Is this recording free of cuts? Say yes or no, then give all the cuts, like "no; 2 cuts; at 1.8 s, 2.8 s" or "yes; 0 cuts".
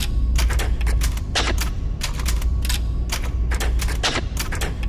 yes; 0 cuts